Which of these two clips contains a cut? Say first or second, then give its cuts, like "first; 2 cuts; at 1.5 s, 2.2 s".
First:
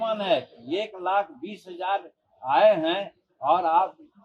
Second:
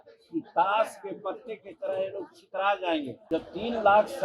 second; 1 cut; at 3.2 s